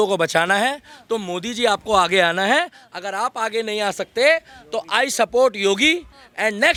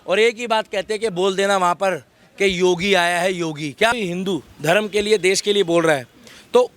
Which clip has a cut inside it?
second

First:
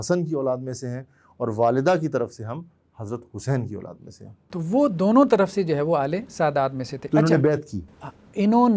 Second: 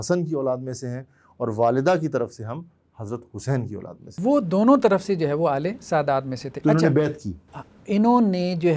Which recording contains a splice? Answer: second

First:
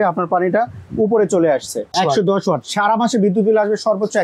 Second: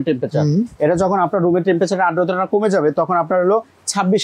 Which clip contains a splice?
first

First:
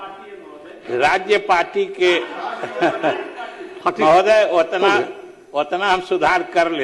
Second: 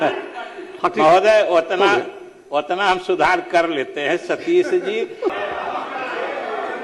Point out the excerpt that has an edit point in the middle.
second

